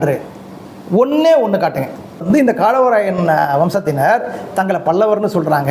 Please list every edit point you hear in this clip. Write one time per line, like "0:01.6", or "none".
0:02.2